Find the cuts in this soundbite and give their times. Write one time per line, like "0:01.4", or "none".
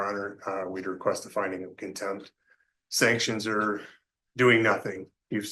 none